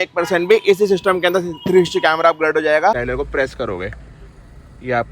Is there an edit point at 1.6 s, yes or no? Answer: no